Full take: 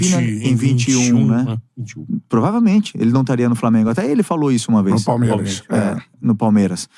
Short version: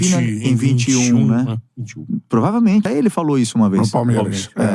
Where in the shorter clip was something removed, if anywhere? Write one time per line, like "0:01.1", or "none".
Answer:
0:02.9